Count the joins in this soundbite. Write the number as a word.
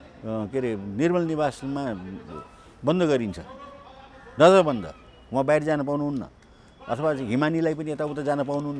zero